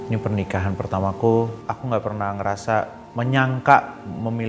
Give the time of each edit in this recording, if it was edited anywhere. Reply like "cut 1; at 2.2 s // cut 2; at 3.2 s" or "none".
cut 1; at 1.6 s // cut 2; at 3.0 s